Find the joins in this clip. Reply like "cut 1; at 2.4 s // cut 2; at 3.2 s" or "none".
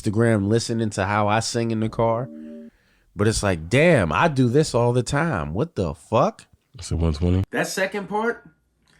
cut 1; at 7.5 s